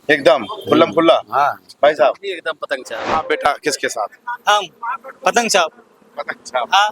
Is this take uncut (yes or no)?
no